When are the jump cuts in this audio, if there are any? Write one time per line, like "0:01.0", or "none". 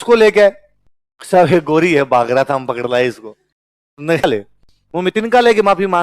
0:04.2